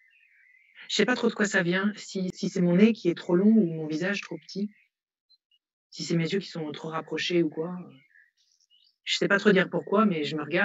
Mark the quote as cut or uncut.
cut